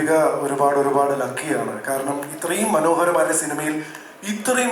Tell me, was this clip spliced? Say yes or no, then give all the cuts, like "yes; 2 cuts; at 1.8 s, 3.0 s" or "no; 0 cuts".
no; 0 cuts